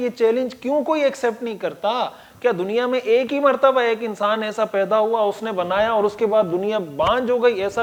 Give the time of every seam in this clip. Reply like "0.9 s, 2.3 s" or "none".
none

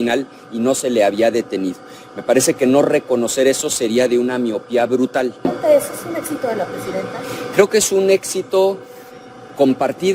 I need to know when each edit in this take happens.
5.5 s

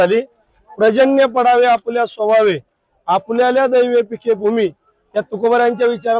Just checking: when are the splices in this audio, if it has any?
none

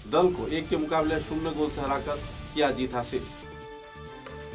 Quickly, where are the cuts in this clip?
none

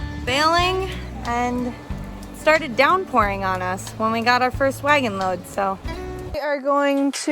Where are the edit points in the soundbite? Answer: 6.3 s

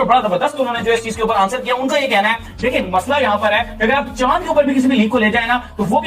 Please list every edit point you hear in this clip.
none

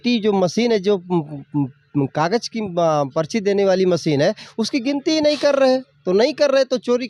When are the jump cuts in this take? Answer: none

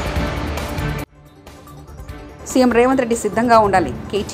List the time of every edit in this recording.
1.1 s

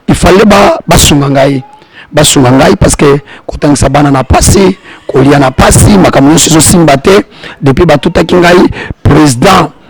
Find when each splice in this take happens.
none

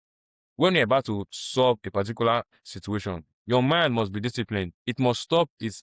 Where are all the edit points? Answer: 4.7 s

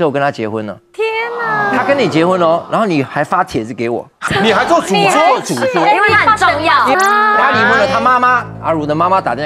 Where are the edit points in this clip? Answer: 4.2 s, 6.9 s

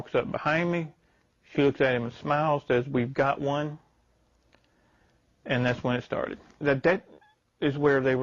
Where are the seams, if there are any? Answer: 6.6 s

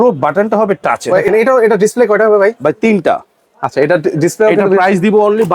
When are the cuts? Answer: 1.1 s

